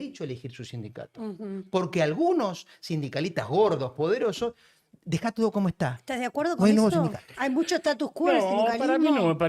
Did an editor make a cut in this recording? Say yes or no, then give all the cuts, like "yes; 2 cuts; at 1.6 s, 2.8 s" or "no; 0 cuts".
no; 0 cuts